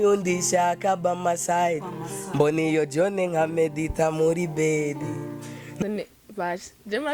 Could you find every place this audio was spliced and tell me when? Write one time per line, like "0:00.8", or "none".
0:05.8